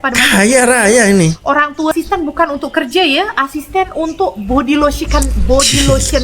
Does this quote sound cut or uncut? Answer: cut